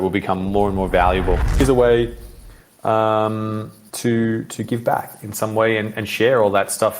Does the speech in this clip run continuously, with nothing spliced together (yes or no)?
no